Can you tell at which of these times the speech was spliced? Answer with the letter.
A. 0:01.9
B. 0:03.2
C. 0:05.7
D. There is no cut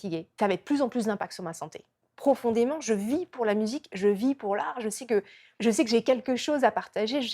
A